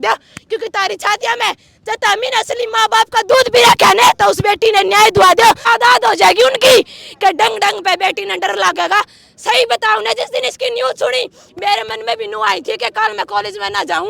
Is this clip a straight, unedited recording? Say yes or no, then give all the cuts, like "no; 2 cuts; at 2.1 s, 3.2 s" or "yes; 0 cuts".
no; 1 cut; at 5.6 s